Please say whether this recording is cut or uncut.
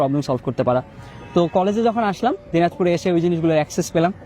uncut